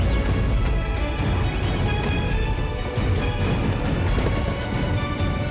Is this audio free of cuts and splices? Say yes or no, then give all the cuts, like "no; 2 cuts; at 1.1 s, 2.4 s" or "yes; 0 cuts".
yes; 0 cuts